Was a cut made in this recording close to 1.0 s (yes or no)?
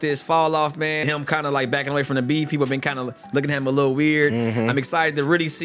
yes